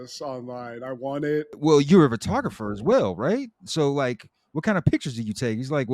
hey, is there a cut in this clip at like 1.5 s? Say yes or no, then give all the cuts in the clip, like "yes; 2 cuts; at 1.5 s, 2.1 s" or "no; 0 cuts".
yes; 1 cut; at 1.5 s